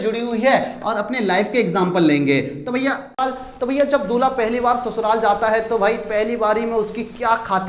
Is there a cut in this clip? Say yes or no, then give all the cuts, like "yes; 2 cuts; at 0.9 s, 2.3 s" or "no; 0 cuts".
yes; 1 cut; at 3.2 s